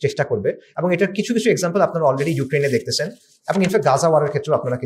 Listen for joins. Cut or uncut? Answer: uncut